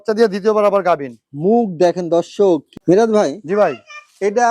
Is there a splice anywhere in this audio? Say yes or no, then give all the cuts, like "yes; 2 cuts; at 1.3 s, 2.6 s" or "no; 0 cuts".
yes; 1 cut; at 2.7 s